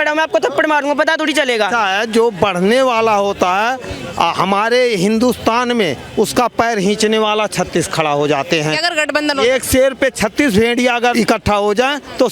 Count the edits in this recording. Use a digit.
3